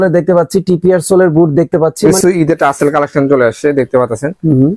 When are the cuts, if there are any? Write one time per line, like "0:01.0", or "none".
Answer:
0:02.1